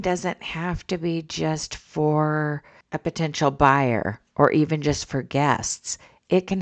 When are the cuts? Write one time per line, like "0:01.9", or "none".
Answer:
none